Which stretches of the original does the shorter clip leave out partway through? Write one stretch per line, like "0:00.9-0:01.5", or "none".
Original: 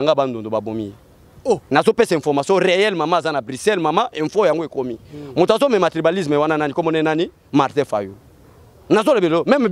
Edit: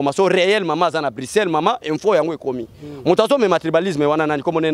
none